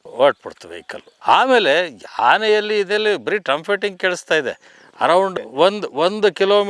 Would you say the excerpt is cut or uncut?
cut